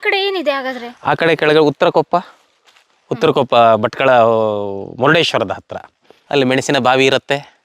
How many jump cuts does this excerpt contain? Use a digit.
1